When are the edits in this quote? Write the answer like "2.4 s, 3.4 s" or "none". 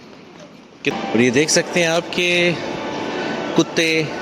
0.9 s